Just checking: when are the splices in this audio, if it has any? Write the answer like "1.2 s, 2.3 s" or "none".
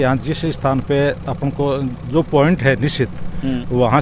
none

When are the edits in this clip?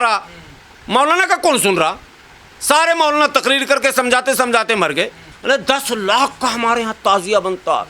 5.3 s

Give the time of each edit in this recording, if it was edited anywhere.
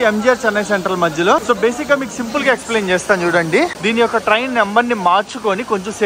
1.4 s, 3.8 s

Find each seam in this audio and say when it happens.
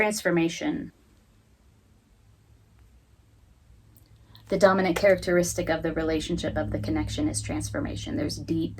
1.0 s

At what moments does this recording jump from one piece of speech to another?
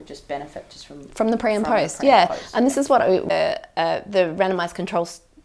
3.3 s

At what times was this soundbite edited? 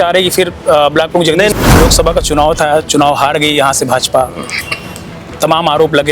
1.5 s

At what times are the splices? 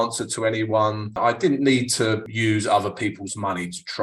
1.1 s, 2.2 s

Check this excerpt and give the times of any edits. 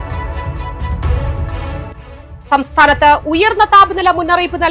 2.0 s

